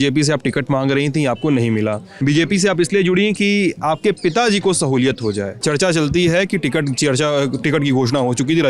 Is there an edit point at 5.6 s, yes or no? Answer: yes